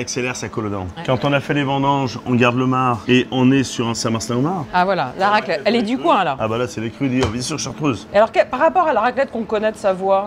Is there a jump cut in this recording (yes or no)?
no